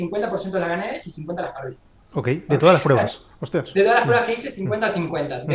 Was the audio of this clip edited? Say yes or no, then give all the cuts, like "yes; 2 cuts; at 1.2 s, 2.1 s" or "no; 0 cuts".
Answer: no; 0 cuts